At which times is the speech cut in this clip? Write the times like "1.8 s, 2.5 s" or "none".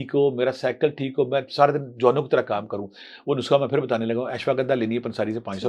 none